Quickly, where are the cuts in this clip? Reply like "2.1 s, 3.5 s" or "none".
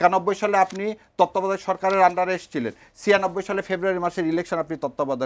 none

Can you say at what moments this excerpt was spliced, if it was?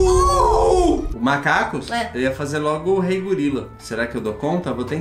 1.1 s, 3.8 s

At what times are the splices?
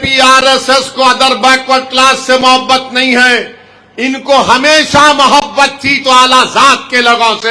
none

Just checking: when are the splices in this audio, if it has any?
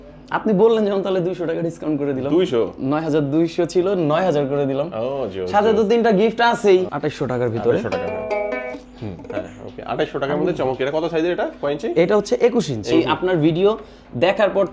6.9 s, 12.9 s

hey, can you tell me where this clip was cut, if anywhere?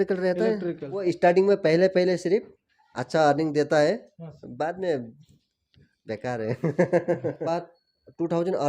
1.0 s, 7.5 s

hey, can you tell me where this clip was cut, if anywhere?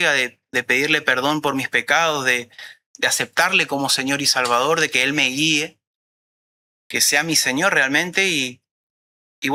none

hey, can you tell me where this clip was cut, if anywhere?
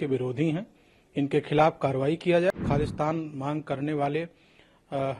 2.5 s

